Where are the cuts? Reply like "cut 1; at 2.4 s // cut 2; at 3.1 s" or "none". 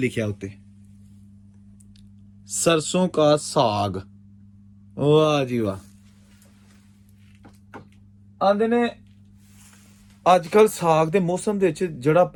none